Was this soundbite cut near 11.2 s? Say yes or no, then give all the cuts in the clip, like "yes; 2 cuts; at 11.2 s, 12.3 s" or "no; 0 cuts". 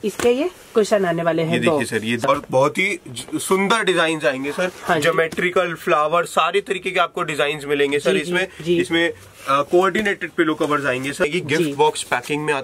yes; 2 cuts; at 2.2 s, 11.2 s